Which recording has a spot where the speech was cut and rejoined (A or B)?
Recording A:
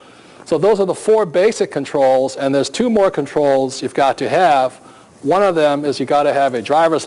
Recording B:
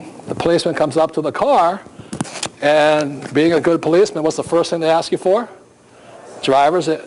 B